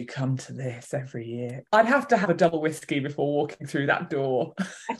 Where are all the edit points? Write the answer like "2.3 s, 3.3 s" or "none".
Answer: 1.5 s